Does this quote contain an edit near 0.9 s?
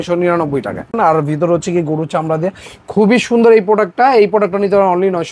yes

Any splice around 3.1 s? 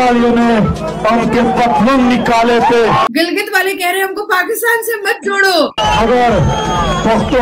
yes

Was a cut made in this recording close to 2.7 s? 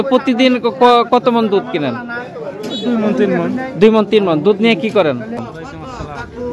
no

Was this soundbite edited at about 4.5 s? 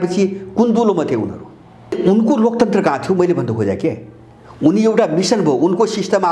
no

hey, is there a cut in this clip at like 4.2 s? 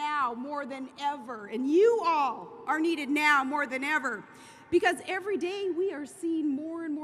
yes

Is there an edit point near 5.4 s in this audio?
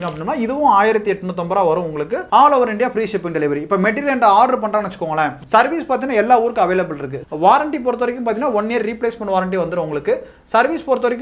no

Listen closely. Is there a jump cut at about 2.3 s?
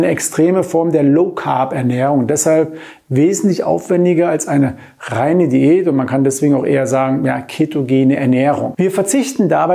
no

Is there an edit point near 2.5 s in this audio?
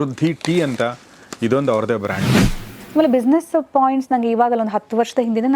yes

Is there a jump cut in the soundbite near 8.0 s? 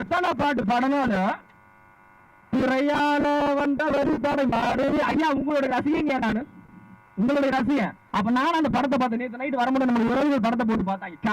yes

